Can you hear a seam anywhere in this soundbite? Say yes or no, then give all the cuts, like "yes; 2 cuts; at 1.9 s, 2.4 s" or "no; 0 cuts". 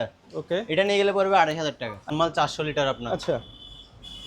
yes; 1 cut; at 2.1 s